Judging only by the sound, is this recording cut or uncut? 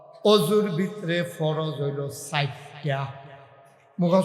uncut